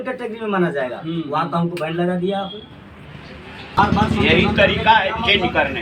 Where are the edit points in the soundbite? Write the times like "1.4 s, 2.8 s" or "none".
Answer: 3.8 s